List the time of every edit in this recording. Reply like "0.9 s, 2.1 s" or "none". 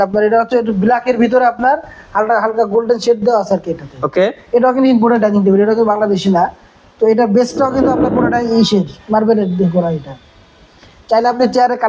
none